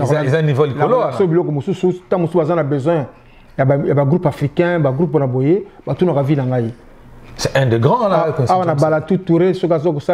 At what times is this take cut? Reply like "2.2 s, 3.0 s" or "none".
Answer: none